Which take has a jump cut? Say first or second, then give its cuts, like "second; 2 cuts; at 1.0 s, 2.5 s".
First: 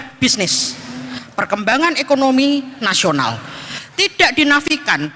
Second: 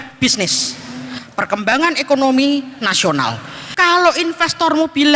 second; 1 cut; at 3.6 s